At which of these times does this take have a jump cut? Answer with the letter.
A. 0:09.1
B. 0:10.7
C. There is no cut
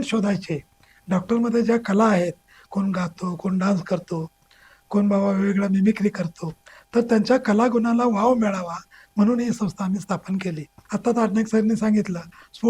B